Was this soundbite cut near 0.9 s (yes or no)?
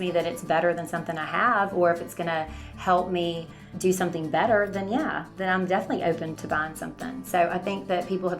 no